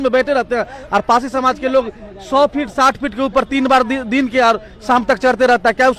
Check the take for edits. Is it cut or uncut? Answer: uncut